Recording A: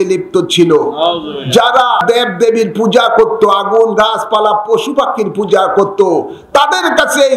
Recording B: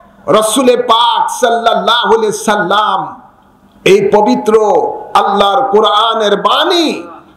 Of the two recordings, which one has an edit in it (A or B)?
A